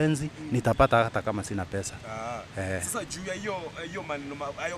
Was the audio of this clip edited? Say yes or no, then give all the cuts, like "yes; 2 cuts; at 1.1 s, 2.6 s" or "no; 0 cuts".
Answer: no; 0 cuts